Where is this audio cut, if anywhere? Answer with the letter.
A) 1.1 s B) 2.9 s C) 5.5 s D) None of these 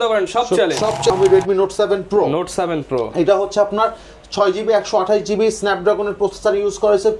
A